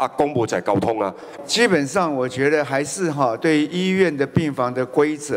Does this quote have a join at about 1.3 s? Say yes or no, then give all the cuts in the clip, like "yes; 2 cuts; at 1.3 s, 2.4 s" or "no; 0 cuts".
yes; 1 cut; at 1.3 s